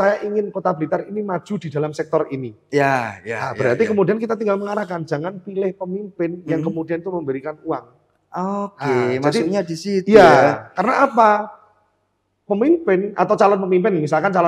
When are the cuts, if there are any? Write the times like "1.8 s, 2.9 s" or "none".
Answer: none